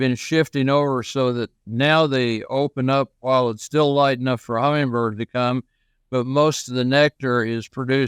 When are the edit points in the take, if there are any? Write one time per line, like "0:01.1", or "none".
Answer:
none